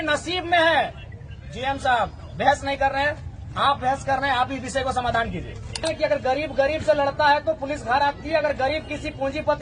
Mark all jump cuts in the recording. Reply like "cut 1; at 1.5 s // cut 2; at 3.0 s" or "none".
cut 1; at 5.8 s